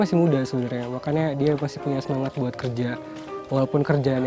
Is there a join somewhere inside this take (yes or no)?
no